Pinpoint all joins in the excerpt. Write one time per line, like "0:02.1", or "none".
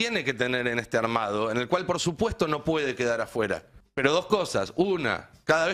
0:03.8